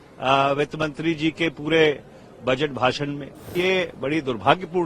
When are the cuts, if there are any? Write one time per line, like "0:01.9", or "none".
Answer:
0:03.5

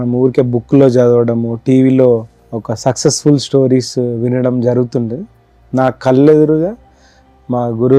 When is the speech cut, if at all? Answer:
none

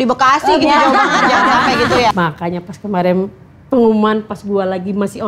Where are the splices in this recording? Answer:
0:02.1

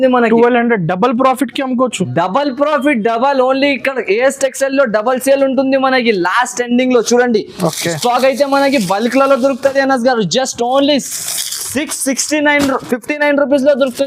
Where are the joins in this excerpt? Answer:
none

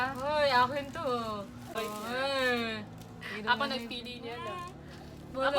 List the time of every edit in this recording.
0:01.8

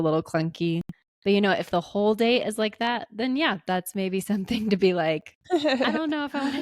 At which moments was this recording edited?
0:05.4

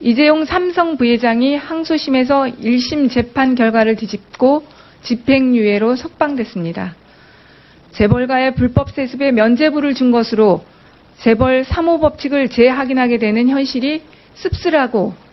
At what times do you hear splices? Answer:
0:01.7

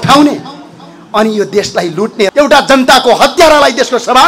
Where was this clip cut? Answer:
0:02.3

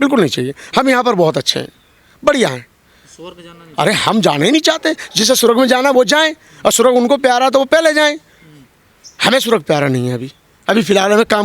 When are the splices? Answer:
none

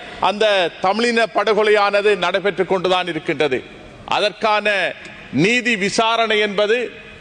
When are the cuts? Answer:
none

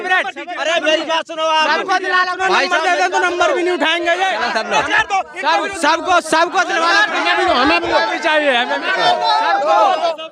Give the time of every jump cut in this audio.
0:04.4

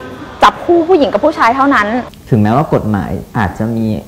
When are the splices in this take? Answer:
0:02.0

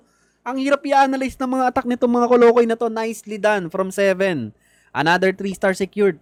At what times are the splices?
none

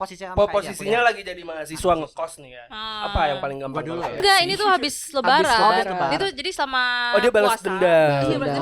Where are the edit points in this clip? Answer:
0:04.2

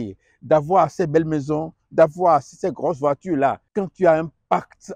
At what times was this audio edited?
0:03.6

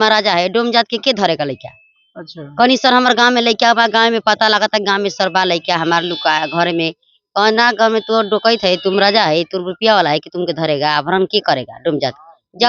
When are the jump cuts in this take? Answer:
none

